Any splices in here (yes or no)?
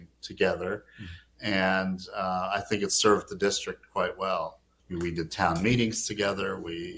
yes